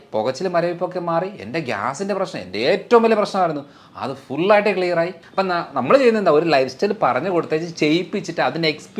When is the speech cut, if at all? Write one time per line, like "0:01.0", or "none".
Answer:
0:05.2

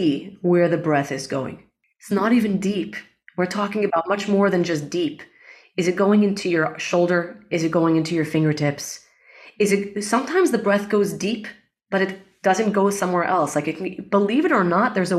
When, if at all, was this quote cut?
0:01.9

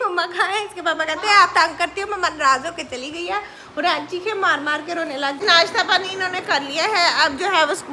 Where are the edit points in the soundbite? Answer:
0:05.4

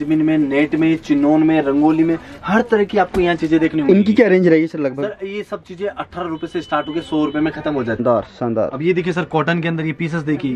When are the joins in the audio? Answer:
0:08.0

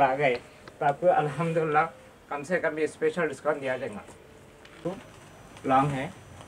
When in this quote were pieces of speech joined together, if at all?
0:04.8

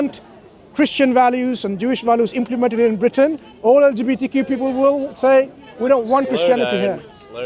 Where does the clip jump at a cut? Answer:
none

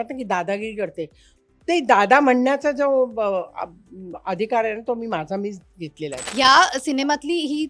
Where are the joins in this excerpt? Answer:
0:06.2

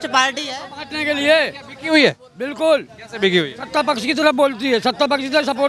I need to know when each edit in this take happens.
none

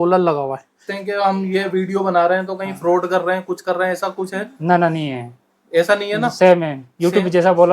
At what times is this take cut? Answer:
0:00.9

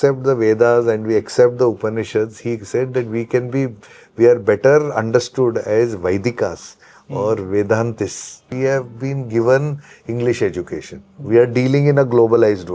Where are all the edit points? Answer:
0:08.4

